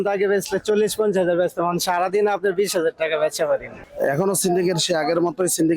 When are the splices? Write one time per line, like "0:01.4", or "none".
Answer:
0:03.8